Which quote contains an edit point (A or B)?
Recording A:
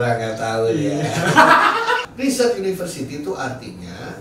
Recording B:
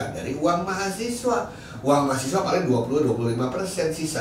A